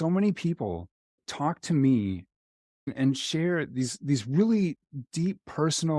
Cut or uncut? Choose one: uncut